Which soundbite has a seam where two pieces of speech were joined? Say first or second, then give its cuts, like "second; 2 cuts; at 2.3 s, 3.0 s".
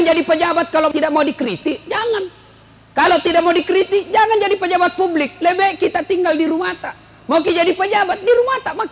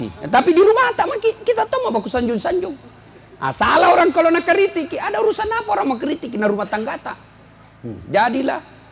first; 1 cut; at 0.9 s